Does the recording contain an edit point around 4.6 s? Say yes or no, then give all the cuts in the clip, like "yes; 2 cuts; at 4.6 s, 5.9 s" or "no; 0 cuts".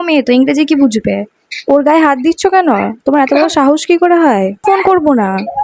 yes; 2 cuts; at 1.3 s, 4.6 s